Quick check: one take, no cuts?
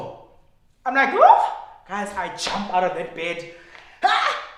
yes; 0 cuts

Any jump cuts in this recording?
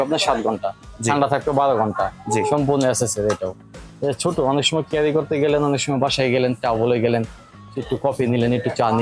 no; 0 cuts

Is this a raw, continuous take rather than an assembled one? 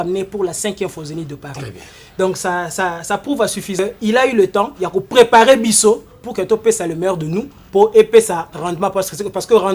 no; 1 cut; at 3.8 s

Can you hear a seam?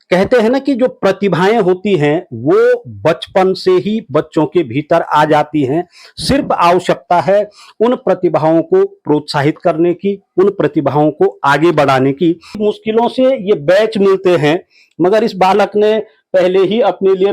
yes; 1 cut; at 12.6 s

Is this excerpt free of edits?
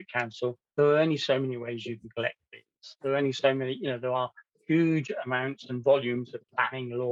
yes; 0 cuts

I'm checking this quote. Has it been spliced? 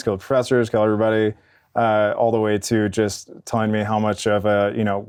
no; 0 cuts

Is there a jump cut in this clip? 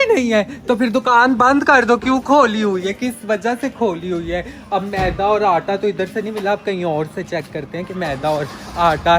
no; 0 cuts

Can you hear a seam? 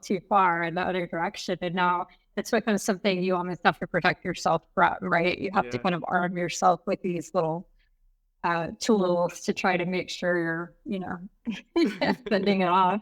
no; 0 cuts

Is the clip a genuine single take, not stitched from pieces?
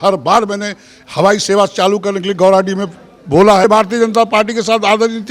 no; 1 cut; at 3.6 s

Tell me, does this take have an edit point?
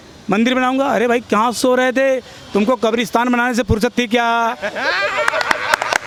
no; 0 cuts

